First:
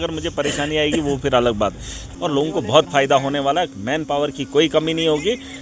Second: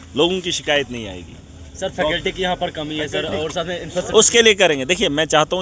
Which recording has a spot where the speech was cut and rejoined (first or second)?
first